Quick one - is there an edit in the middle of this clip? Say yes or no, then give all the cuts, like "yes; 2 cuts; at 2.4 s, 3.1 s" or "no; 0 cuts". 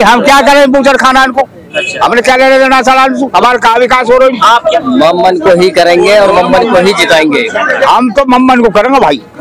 yes; 2 cuts; at 4.7 s, 7.8 s